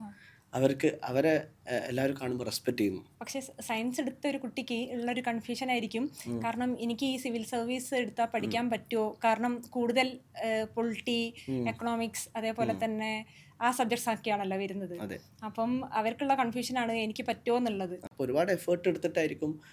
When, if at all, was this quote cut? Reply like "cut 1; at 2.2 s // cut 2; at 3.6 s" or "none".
cut 1; at 3.1 s // cut 2; at 18.0 s